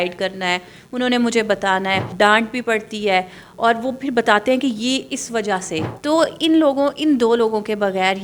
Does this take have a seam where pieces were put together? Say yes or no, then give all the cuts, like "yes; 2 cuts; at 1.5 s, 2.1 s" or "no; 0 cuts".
yes; 2 cuts; at 2.1 s, 5.9 s